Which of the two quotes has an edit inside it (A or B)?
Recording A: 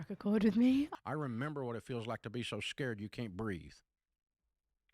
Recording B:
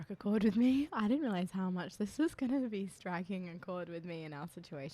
A